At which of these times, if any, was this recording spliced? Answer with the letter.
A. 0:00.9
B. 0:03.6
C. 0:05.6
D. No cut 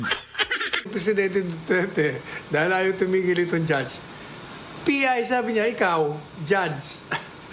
A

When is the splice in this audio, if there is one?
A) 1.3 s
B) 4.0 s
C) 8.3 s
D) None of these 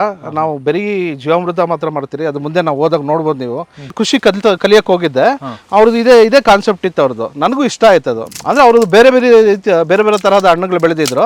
B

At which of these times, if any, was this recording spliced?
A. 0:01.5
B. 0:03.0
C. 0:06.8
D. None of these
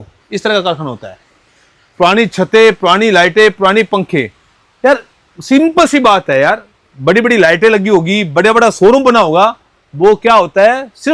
D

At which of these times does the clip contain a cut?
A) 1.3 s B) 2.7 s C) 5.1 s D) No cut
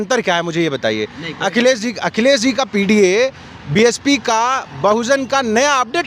D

